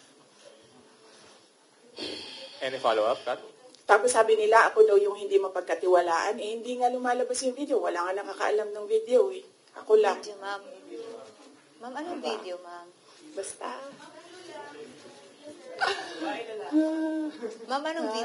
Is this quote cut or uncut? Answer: uncut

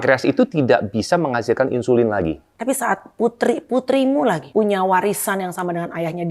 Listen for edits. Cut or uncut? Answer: cut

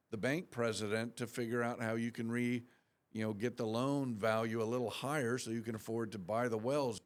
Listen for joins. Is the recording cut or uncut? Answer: uncut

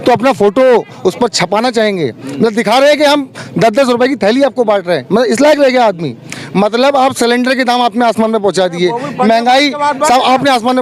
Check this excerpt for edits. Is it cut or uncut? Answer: uncut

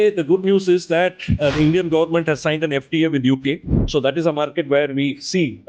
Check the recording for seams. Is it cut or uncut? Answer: uncut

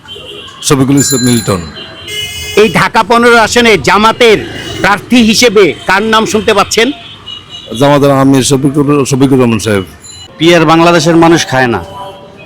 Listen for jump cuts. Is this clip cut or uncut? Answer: cut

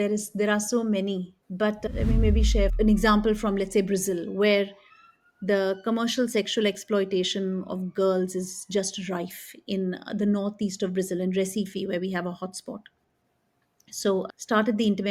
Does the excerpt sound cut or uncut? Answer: uncut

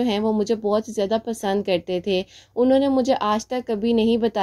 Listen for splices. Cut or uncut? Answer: uncut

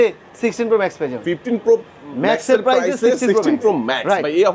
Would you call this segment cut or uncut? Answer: uncut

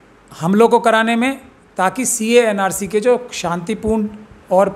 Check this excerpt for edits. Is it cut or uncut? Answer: uncut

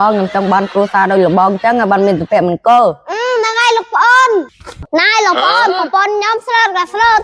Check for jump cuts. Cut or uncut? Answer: cut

